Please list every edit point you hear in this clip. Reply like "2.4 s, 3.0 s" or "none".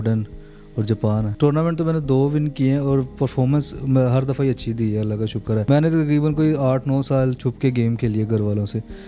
1.3 s, 5.6 s